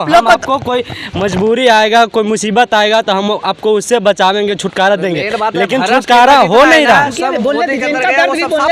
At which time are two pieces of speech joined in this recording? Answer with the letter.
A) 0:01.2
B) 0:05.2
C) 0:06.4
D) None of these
D